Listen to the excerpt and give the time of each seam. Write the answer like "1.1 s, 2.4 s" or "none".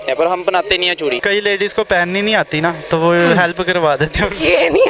1.2 s

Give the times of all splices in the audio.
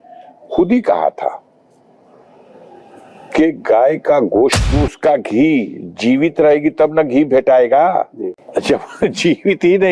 4.7 s, 8.4 s

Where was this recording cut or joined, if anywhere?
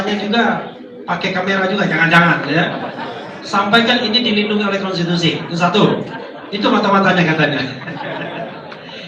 none

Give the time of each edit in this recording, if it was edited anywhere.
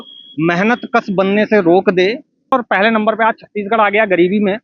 2.5 s

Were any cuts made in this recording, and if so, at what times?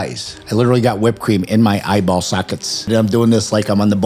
2.9 s

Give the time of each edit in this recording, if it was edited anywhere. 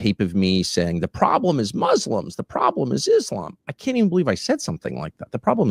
none

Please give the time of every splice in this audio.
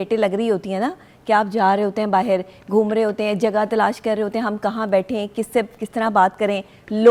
none

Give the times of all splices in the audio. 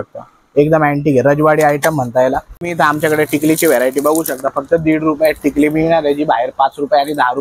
2.6 s

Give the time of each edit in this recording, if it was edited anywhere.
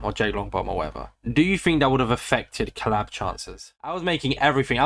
3.6 s

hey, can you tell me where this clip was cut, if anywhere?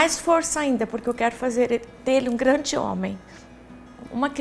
3.3 s

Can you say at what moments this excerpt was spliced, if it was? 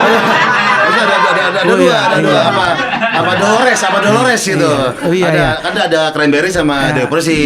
none

